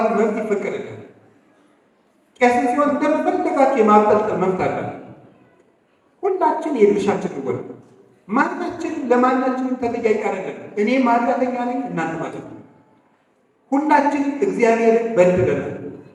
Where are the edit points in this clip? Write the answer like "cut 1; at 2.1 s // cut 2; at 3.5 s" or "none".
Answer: none

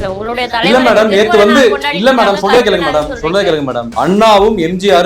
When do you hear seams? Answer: cut 1; at 3.9 s

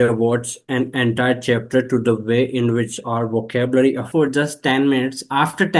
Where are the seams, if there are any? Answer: cut 1; at 4.1 s

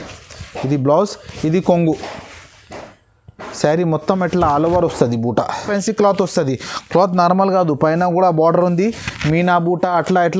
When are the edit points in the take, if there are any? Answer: cut 1; at 5.7 s

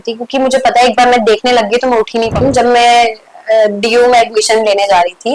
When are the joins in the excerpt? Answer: cut 1; at 2.4 s

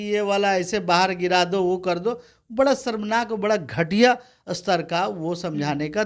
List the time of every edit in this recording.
none

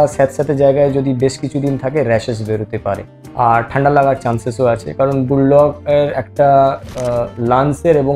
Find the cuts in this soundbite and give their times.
none

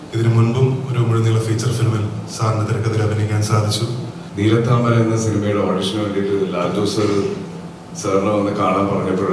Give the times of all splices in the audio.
cut 1; at 4.2 s

